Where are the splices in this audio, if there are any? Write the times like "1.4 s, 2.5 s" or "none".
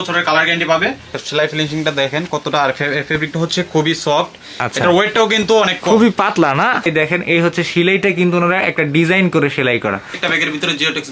1.2 s, 6.8 s, 10.2 s